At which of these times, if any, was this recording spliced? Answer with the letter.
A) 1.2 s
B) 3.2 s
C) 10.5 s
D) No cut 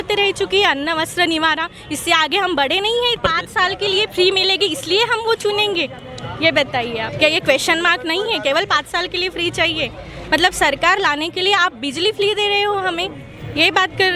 B